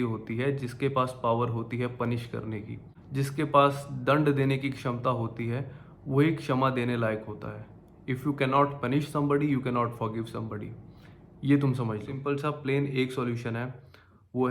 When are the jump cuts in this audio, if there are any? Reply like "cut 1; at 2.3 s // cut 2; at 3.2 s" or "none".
cut 1; at 12.1 s